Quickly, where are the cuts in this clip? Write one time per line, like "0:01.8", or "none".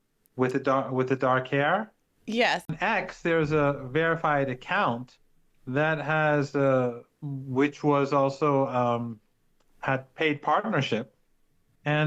0:02.7